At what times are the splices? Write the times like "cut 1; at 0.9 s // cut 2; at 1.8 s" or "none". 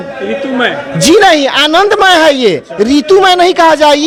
none

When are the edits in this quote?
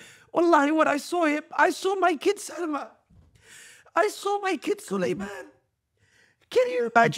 none

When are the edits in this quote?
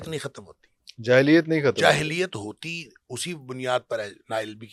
none

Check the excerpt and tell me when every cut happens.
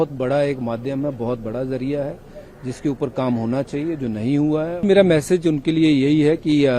cut 1; at 4.8 s

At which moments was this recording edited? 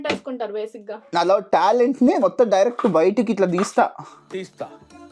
cut 1; at 1.1 s

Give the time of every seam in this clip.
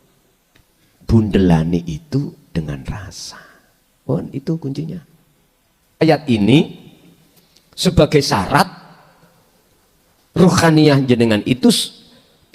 cut 1; at 6.0 s

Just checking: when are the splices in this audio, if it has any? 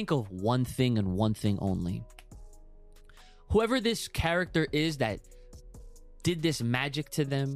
none

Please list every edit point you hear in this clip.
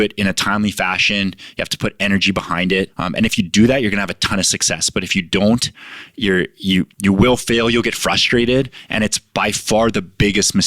cut 1; at 3.0 s

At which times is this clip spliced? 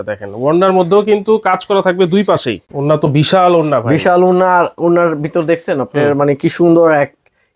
cut 1; at 2.7 s

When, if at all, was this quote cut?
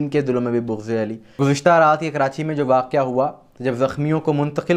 cut 1; at 1.4 s

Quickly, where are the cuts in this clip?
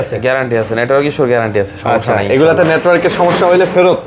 none

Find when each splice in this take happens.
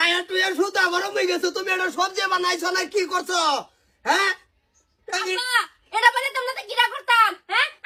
none

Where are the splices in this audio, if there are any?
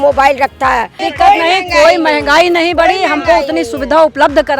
cut 1; at 1.0 s

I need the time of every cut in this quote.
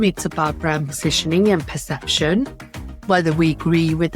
none

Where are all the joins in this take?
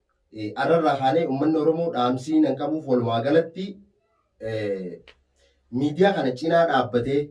none

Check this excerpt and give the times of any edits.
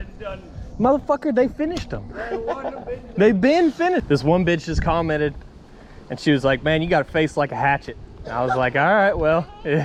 cut 1; at 4.0 s

